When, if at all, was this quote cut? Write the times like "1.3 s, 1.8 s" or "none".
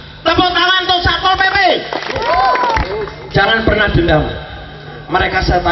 2.8 s, 4.6 s